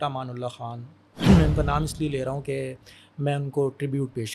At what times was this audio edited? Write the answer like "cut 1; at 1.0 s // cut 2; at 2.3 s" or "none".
cut 1; at 1.1 s

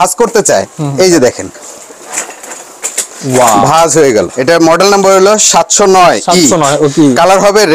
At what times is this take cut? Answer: cut 1; at 4.3 s

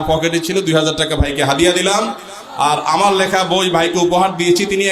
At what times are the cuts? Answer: none

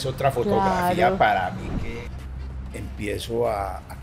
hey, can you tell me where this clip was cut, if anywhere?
cut 1; at 1.7 s

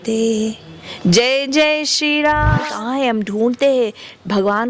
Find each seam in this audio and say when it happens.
cut 1; at 2.7 s

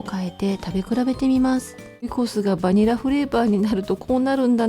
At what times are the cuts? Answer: cut 1; at 2.1 s

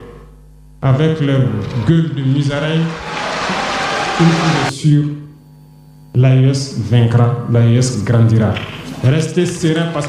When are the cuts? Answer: cut 1; at 4.2 s

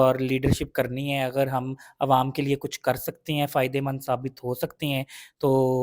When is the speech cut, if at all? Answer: none

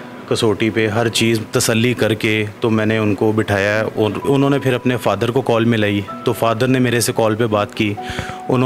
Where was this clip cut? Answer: none

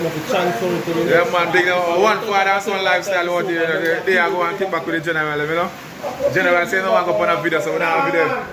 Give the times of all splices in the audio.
none

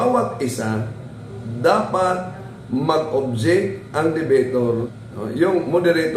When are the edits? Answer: cut 1; at 4.8 s

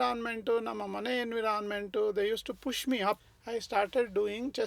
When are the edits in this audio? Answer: cut 1; at 3.3 s

